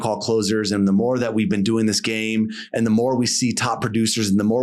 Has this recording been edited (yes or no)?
no